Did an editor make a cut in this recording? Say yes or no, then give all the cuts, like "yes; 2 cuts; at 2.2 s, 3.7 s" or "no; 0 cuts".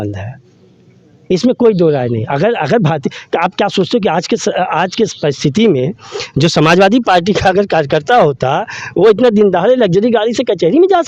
no; 0 cuts